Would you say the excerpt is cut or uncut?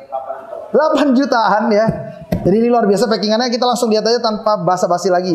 uncut